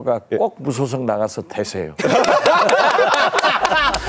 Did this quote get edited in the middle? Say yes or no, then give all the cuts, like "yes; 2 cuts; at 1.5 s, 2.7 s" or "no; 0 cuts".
no; 0 cuts